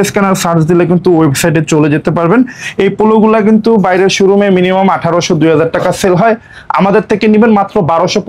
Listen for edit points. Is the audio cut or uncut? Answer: uncut